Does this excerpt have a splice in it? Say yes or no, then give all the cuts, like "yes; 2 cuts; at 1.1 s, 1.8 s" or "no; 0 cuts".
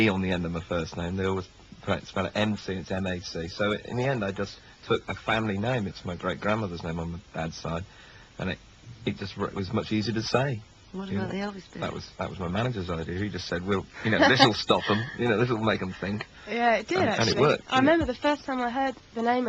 yes; 1 cut; at 6.4 s